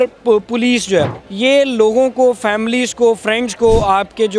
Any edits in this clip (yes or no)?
yes